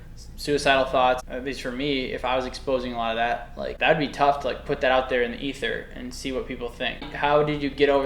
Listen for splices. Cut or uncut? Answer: cut